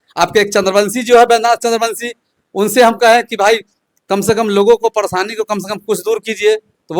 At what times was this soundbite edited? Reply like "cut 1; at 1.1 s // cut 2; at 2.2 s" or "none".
none